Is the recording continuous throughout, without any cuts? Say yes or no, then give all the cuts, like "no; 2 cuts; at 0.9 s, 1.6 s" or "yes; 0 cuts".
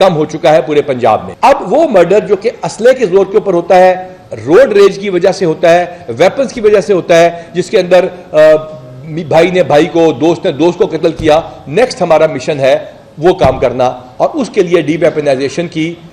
no; 1 cut; at 1.3 s